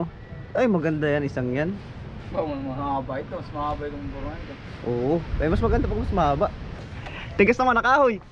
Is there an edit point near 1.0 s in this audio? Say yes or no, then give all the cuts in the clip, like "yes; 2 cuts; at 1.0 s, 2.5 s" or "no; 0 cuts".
no; 1 cut; at 6.8 s